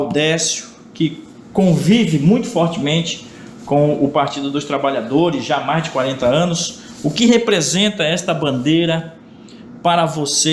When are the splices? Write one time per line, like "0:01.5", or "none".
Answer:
none